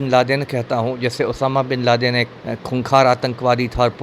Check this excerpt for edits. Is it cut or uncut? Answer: uncut